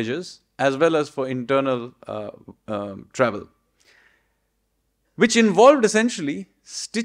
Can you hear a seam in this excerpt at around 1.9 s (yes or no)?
no